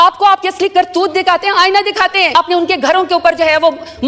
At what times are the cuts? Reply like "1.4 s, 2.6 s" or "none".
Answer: 2.3 s